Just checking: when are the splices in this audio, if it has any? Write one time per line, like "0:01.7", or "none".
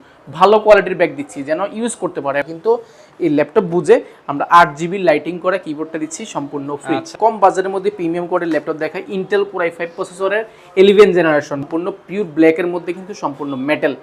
0:02.5
0:07.1
0:11.6